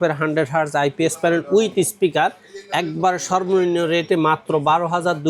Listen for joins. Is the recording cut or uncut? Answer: uncut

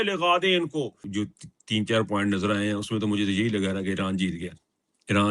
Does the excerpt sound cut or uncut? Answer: cut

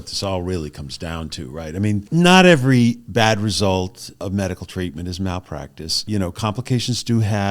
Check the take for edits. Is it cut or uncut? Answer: cut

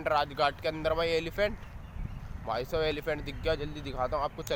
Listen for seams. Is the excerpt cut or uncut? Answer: uncut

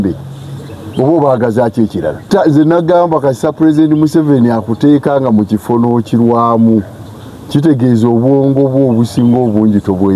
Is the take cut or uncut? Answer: cut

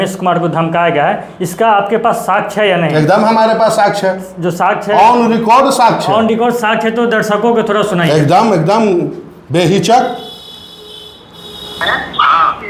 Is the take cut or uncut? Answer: uncut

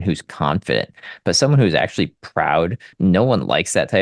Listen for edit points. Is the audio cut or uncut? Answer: cut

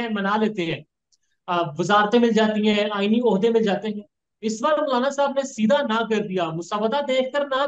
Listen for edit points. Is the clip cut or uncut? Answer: uncut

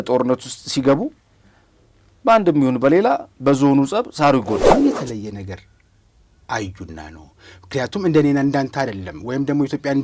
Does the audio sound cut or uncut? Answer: cut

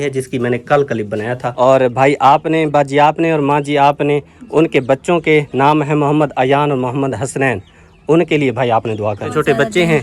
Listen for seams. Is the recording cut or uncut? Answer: cut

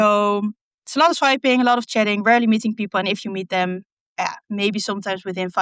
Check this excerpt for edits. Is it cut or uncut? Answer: uncut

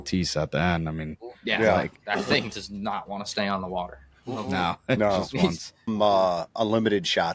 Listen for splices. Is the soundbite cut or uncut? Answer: cut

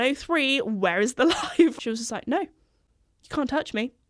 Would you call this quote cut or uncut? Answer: cut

